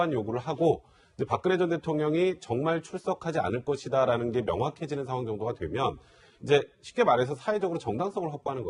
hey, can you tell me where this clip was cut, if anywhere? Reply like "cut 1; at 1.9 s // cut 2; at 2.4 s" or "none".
none

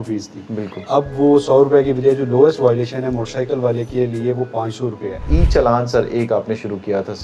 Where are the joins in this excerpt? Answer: cut 1; at 5.2 s

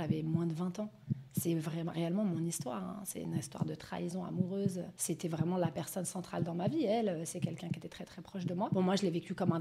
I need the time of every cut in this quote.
cut 1; at 4.9 s // cut 2; at 8.7 s

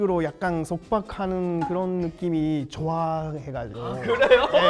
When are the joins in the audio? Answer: cut 1; at 3.7 s

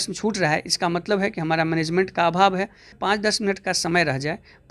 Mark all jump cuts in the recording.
cut 1; at 3.0 s

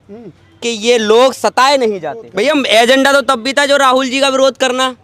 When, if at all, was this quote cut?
cut 1; at 2.2 s

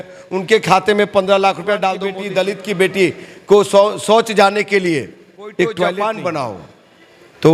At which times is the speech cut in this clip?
cut 1; at 2.1 s // cut 2; at 6.0 s

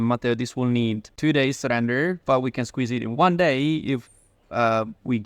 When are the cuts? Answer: cut 1; at 1.1 s

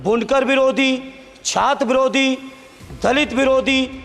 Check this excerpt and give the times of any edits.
none

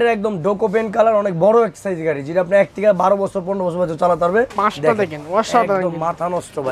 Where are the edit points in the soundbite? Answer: cut 1; at 4.5 s

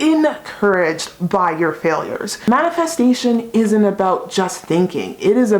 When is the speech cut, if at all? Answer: cut 1; at 2.3 s

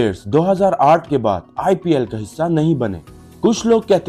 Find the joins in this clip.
cut 1; at 3.1 s

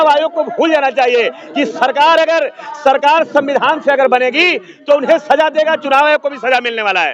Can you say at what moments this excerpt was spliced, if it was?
none

